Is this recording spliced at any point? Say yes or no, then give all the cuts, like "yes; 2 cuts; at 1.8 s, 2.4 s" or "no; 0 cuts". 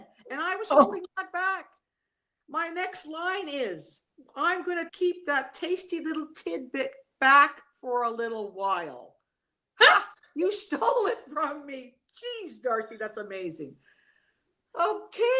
yes; 1 cut; at 4.9 s